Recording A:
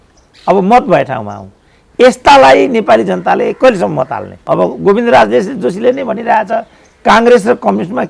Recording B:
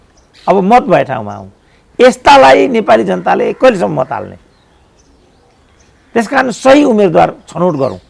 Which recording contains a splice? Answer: A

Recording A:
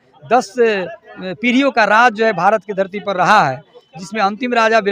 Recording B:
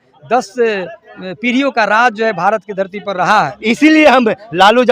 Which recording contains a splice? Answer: B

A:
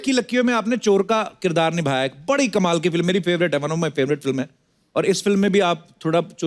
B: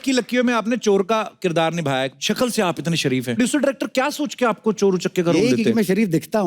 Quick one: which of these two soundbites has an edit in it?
B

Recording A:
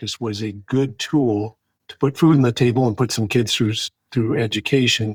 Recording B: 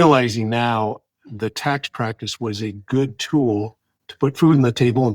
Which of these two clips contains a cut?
B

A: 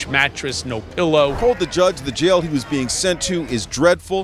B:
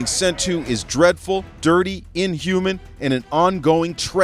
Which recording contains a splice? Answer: A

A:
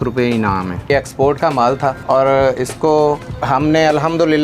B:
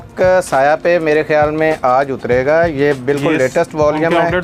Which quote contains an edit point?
A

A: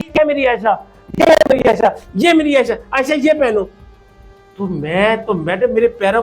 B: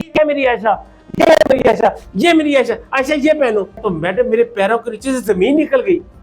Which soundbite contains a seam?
B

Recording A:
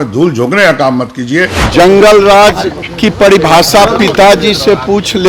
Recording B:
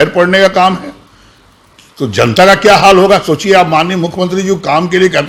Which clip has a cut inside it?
A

